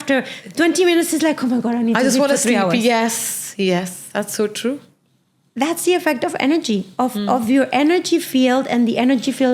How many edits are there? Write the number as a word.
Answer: zero